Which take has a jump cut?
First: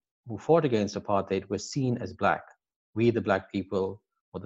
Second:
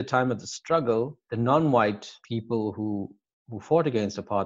second; 2 cuts; at 1.2 s, 2.1 s

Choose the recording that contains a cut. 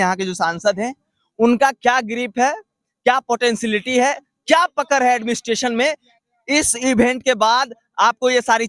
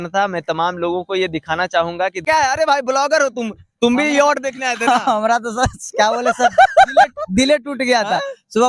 second; 1 cut; at 2.2 s

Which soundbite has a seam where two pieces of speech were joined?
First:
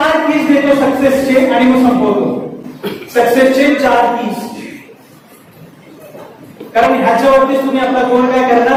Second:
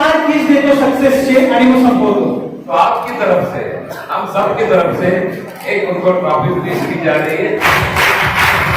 second; 2 cuts; at 2.6 s, 7.5 s

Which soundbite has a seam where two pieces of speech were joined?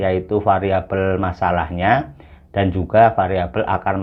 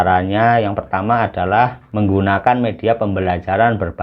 second; 1 cut; at 1.8 s

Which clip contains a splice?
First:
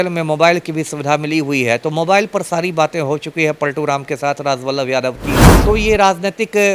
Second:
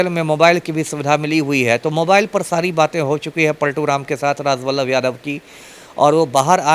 first; 1 cut; at 5.5 s

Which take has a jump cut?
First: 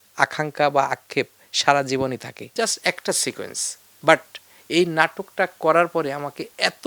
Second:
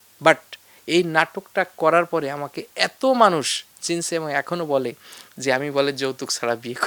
first; 1 cut; at 2.4 s

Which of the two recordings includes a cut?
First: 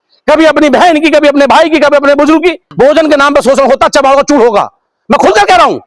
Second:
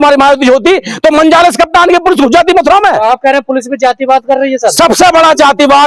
first; 1 cut; at 2.6 s

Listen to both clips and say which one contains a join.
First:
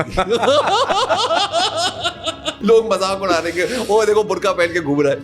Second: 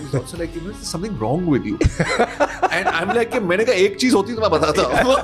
first; 1 cut; at 2.6 s

